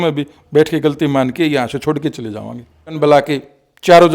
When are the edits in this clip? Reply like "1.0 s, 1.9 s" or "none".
3.0 s

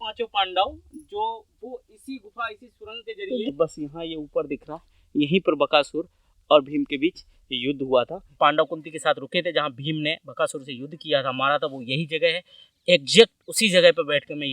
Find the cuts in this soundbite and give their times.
3.5 s, 8.4 s

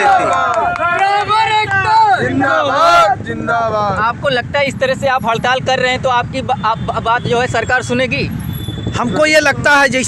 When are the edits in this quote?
none

